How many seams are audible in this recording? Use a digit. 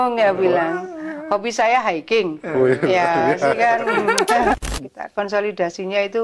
1